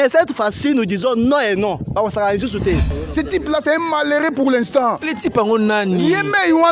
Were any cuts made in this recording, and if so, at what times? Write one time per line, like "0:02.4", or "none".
0:03.0